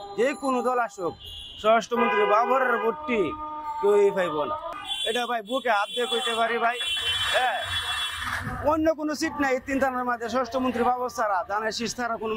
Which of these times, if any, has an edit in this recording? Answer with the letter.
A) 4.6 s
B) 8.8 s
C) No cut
A